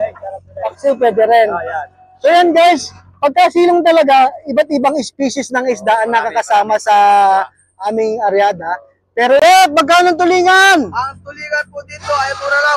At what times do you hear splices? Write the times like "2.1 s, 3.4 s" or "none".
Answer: 9.4 s